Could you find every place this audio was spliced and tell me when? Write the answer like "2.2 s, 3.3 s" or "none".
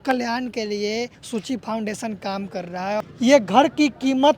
1.2 s, 3.0 s